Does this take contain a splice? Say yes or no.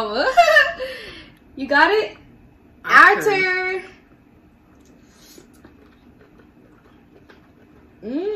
no